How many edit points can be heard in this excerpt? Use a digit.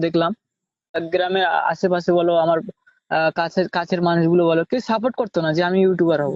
1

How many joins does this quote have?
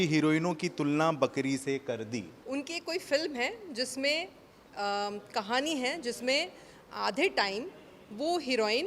1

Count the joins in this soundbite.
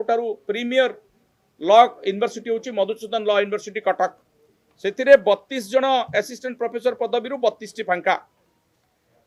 0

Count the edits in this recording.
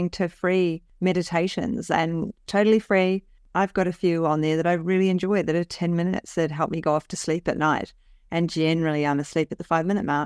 1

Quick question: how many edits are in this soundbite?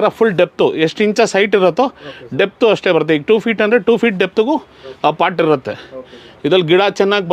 0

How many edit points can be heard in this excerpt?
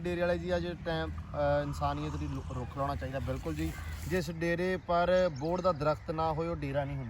1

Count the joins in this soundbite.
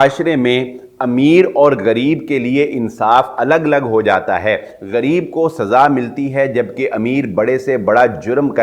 0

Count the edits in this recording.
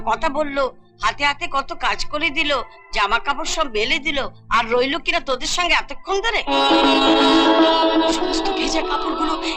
1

